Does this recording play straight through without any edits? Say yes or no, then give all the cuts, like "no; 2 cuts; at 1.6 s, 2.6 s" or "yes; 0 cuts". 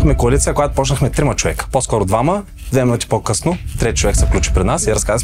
yes; 0 cuts